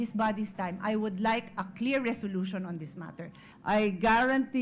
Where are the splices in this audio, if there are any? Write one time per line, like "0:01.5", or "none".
0:03.4

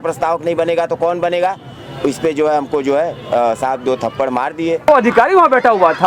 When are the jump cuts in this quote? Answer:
0:04.9

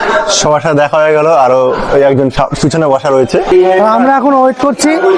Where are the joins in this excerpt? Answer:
0:03.5

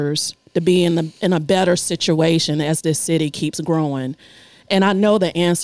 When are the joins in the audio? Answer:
none

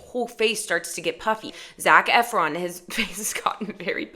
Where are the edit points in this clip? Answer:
0:01.7

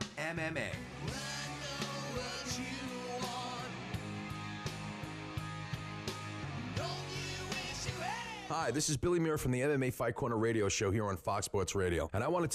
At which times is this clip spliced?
0:08.3

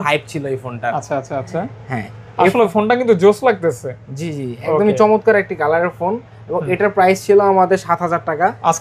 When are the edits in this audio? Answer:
none

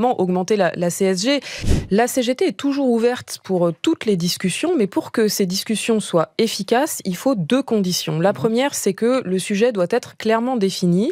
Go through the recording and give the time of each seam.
0:01.6

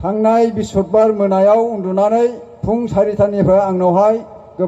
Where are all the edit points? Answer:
none

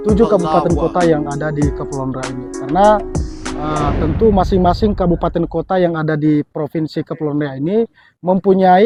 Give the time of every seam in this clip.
none

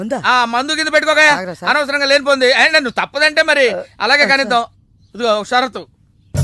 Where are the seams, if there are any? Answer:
none

